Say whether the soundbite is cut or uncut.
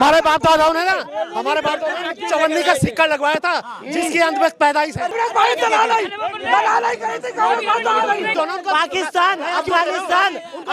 cut